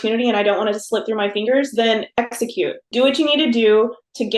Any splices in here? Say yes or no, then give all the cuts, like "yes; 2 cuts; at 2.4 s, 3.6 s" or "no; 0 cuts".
yes; 1 cut; at 2.8 s